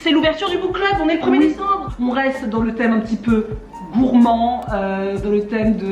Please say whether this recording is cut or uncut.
cut